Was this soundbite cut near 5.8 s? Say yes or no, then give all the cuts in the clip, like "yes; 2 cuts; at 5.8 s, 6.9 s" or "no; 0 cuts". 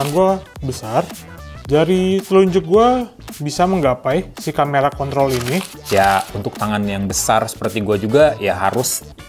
yes; 2 cuts; at 1.3 s, 5.8 s